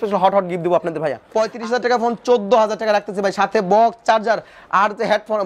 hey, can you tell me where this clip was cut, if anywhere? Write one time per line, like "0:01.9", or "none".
0:01.2